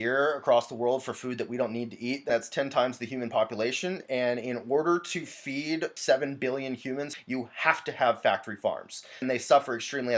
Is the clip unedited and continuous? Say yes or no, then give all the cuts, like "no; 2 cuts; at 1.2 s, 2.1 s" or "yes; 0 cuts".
no; 4 cuts; at 2.2 s, 5.9 s, 7.1 s, 9.2 s